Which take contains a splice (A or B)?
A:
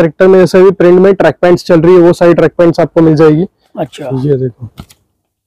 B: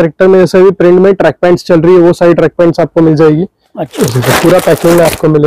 B